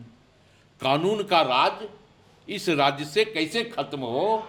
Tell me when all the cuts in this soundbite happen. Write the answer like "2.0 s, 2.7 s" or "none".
none